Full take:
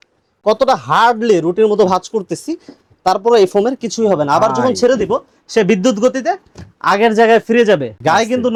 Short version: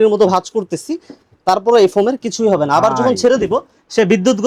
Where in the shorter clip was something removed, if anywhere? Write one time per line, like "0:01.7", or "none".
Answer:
none